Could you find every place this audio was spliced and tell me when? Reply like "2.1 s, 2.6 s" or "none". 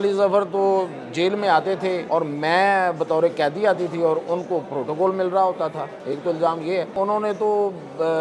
2.0 s, 5.9 s, 6.9 s